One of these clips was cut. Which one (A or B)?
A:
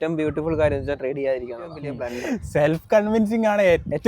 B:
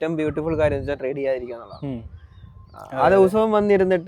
A